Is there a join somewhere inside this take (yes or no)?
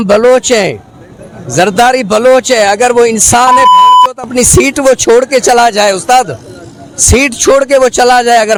no